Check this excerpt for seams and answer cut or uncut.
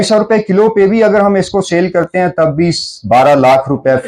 uncut